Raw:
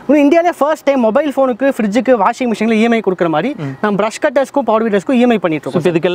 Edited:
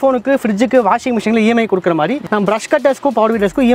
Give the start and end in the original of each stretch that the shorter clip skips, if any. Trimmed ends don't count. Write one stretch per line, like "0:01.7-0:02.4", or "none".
0:03.6-0:03.7